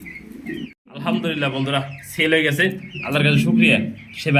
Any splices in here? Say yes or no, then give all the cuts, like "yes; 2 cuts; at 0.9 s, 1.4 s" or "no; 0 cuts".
no; 0 cuts